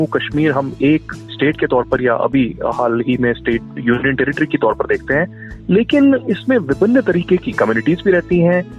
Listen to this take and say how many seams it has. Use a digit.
2